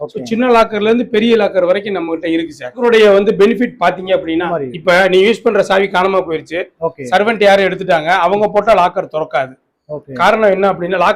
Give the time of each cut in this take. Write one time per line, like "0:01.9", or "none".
0:02.7
0:04.5